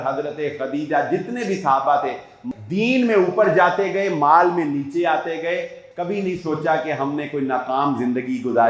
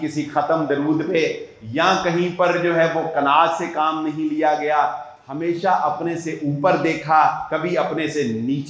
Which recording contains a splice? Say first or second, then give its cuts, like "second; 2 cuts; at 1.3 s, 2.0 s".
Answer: first; 1 cut; at 2.4 s